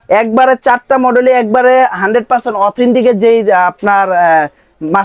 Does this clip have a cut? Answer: no; 0 cuts

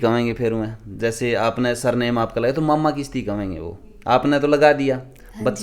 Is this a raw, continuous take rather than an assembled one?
yes; 0 cuts

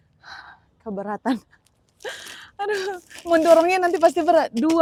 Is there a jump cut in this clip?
no; 0 cuts

